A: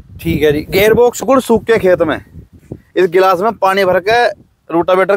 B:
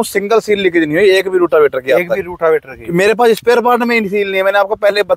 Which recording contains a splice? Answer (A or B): A